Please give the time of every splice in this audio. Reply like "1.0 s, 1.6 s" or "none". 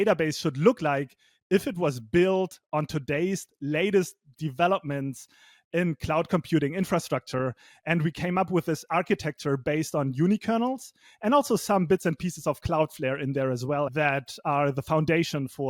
13.9 s